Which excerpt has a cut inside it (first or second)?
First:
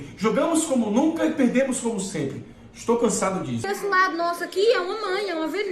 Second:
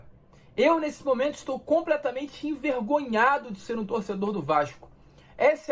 first